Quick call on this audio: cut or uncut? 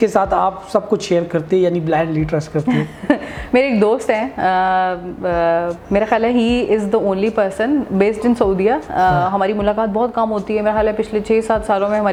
uncut